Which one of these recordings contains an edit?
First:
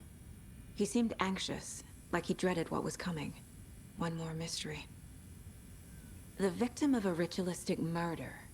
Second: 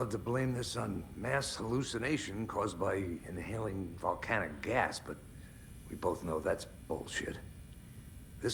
first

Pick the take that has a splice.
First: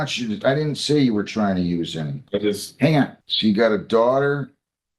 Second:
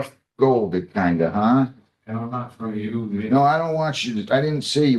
first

